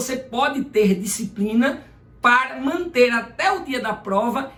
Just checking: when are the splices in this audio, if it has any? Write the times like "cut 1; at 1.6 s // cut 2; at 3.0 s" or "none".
none